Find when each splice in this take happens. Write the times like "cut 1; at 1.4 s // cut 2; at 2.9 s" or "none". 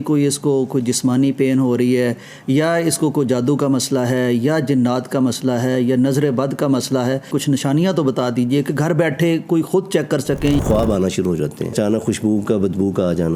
cut 1; at 7.3 s // cut 2; at 10.6 s // cut 3; at 11.7 s

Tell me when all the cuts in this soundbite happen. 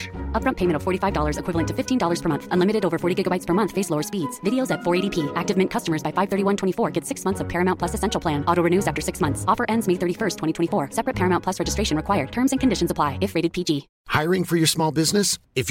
cut 1; at 14.0 s

